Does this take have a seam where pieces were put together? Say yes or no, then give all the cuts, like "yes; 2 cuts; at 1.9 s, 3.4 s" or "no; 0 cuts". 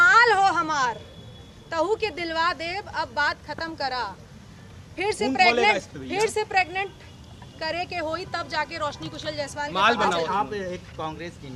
no; 0 cuts